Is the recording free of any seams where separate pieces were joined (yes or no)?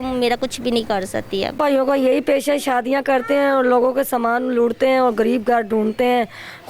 no